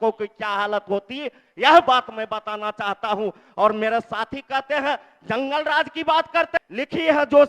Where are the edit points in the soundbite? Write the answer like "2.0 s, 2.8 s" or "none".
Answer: 6.6 s